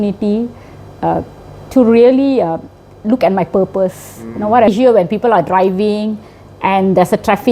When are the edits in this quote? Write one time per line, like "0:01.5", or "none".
0:04.7